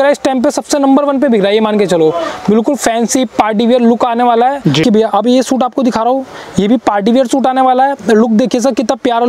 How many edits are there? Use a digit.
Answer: 1